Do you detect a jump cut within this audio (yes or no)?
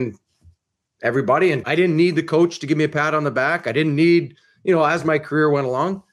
yes